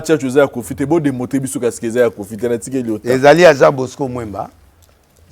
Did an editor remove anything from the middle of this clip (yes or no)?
no